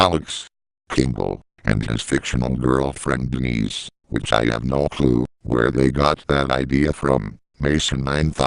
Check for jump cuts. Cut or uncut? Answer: cut